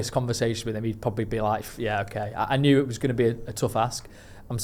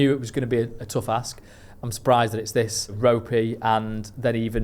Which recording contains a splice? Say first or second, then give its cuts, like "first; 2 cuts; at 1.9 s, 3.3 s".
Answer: second; 1 cut; at 2.9 s